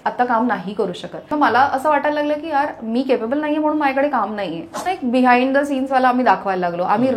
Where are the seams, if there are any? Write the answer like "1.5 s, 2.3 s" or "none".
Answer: 1.3 s, 4.9 s